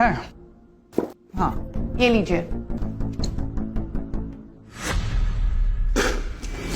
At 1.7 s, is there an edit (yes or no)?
yes